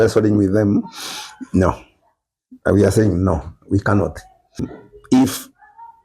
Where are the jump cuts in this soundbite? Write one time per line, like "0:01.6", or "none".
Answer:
0:04.7